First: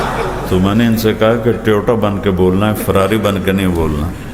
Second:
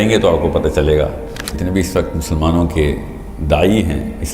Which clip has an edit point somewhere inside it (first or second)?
second